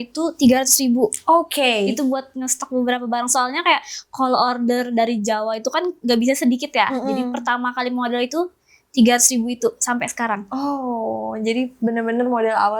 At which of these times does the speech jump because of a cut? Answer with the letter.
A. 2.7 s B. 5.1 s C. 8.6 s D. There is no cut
D